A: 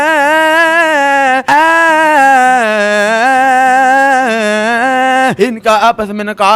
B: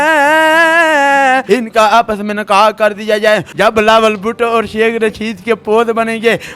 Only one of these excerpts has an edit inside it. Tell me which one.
B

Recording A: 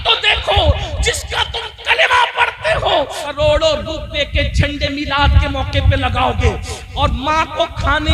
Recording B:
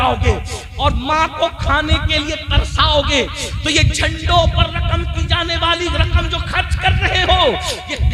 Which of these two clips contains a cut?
A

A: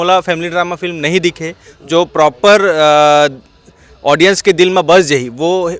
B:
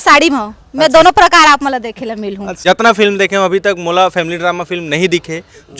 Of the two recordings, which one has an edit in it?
B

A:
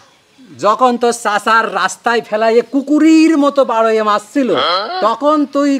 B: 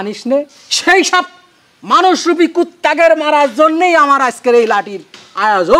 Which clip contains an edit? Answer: A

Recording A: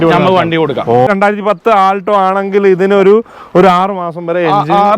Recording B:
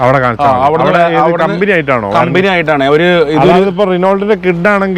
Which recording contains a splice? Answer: A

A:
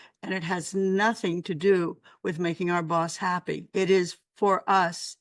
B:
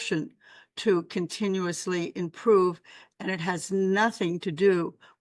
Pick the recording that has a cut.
A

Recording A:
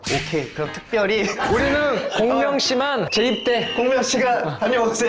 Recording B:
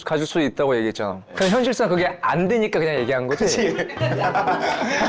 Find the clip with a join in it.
A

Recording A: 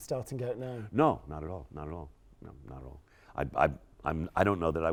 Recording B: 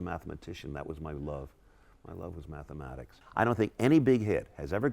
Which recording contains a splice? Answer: B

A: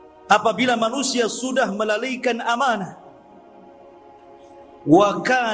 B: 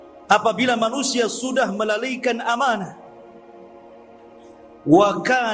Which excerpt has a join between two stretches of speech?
A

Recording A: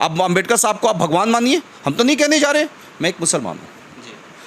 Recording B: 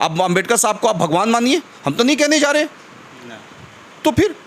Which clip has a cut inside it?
A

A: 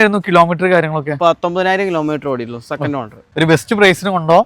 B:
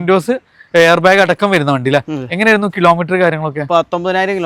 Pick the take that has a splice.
A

